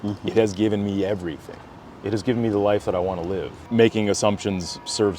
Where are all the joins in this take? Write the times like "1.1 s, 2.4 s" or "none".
3.6 s